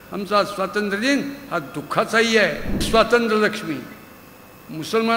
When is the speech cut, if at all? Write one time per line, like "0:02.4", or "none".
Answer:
0:02.9